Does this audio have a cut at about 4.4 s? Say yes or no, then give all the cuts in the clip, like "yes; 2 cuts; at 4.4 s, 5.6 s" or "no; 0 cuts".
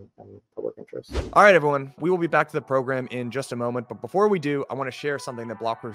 no; 1 cut; at 1.3 s